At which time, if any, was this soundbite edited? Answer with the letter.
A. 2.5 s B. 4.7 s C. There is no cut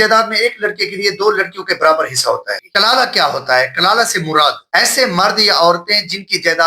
A